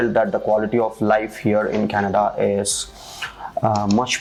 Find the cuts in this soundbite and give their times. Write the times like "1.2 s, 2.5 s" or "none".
none